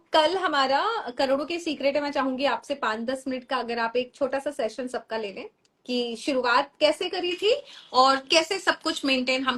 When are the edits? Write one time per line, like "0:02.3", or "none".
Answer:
none